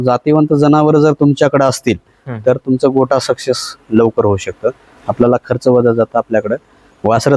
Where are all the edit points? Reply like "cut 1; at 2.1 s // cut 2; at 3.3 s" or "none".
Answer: cut 1; at 4.9 s